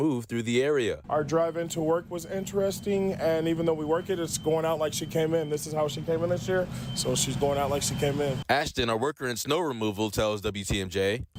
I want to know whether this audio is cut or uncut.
uncut